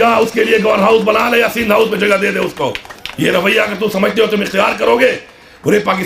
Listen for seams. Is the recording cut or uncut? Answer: uncut